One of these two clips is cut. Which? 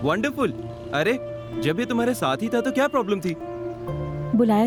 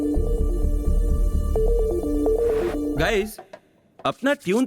second; 1 cut; at 3.0 s

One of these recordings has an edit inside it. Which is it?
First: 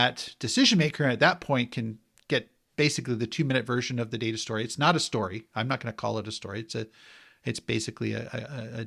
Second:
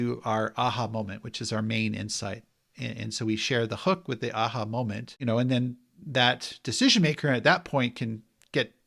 second; 1 cut; at 5.1 s

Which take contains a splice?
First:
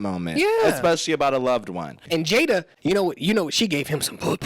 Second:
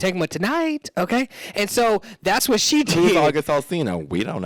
first; 1 cut; at 1.9 s

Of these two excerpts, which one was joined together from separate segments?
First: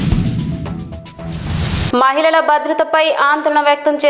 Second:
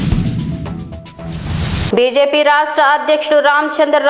first; 1 cut; at 1.9 s

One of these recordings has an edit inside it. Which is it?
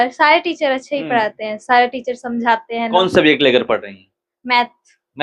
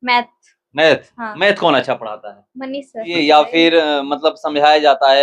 second; 1 cut; at 3.1 s

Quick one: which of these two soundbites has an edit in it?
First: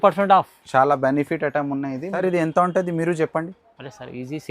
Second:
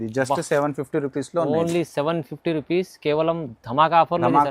first; 1 cut; at 2.2 s

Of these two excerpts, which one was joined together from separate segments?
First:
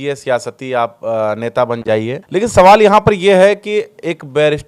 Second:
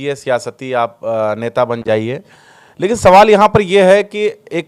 first; 1 cut; at 2.2 s

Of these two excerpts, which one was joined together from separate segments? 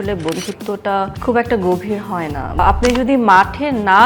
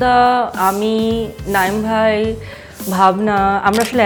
first; 2 cuts; at 1.2 s, 2.6 s

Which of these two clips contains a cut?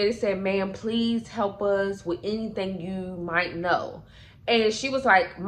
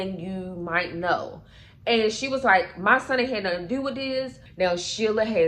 second; 1 cut; at 4.4 s

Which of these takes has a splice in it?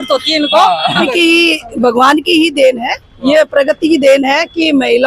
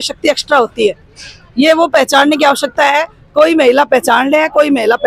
first; 1 cut; at 1.1 s

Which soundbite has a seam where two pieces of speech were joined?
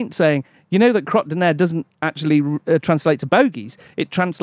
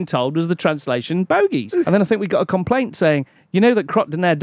second; 1 cut; at 1.9 s

